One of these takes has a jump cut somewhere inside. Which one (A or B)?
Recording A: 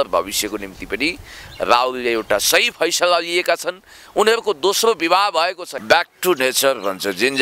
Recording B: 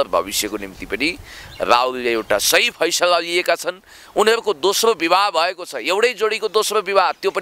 A